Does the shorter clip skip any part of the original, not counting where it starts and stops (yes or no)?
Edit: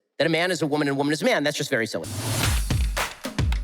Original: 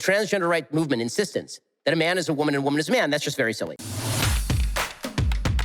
yes